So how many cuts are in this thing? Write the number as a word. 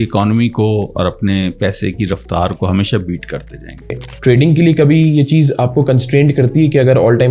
one